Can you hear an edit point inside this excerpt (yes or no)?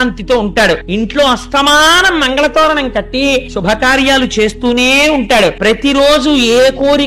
yes